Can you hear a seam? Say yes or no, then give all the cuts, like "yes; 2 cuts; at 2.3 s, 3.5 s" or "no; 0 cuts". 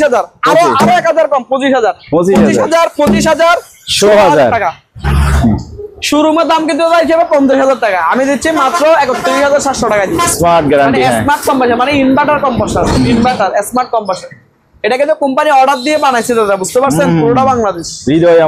yes; 2 cuts; at 5.0 s, 10.3 s